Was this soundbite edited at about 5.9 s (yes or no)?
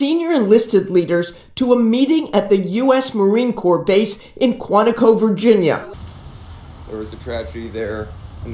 yes